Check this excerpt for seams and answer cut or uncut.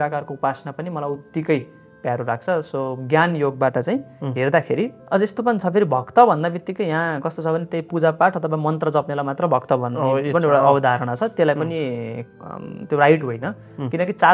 cut